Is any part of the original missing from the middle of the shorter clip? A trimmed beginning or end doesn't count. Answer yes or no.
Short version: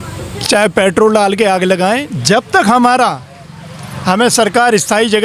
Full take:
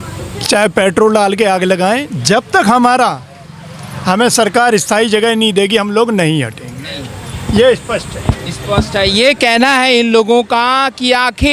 no